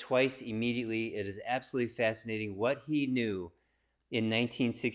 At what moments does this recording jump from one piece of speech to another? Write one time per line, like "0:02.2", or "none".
none